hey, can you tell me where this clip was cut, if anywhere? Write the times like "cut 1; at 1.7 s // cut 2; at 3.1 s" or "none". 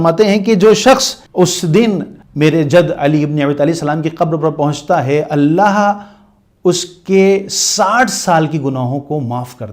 cut 1; at 1.2 s // cut 2; at 2.2 s